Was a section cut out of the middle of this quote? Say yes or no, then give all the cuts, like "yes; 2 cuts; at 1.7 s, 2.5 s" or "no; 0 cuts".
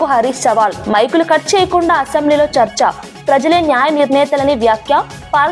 no; 0 cuts